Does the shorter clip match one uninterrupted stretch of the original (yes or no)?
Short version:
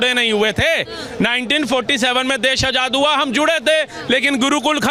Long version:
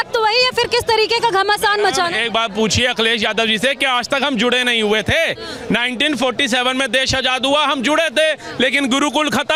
yes